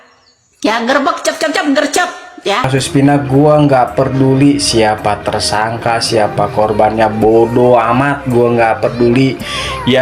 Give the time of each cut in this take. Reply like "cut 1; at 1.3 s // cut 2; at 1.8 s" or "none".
cut 1; at 2.7 s

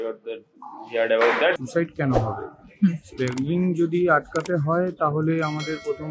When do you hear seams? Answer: cut 1; at 1.6 s

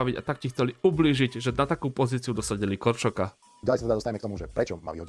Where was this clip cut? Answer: cut 1; at 3.4 s

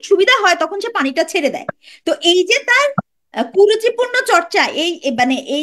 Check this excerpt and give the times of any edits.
none

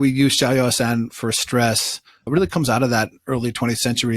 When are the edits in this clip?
cut 1; at 2.3 s

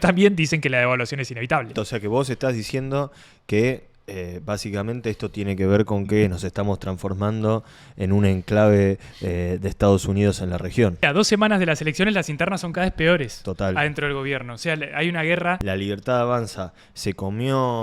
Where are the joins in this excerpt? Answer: cut 1; at 1.7 s // cut 2; at 11.0 s // cut 3; at 15.6 s

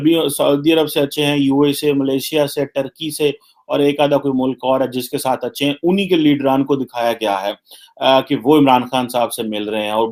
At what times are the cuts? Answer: none

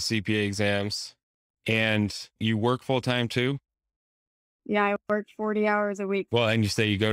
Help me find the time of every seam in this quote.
cut 1; at 2.4 s // cut 2; at 6.3 s

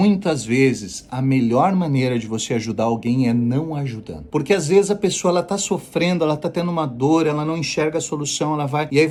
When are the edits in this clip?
none

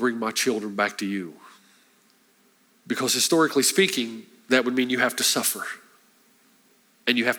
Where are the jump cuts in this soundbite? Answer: cut 1; at 2.7 s

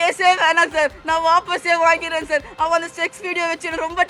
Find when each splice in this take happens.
none

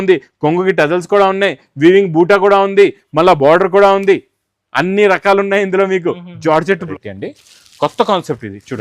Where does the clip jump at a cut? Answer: cut 1; at 6.8 s

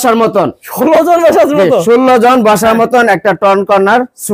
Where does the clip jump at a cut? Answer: none

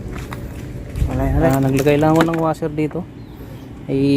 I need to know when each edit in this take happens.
cut 1; at 1.5 s

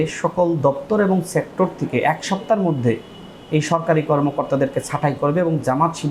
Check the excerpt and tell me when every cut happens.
none

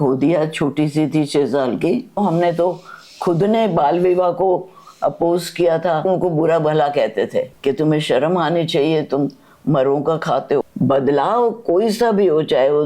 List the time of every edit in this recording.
cut 1; at 2.2 s // cut 2; at 6.1 s // cut 3; at 10.6 s

